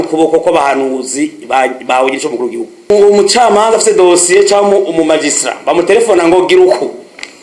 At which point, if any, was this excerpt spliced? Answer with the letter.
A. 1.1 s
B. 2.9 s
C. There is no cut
B